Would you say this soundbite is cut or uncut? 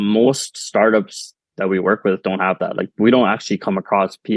uncut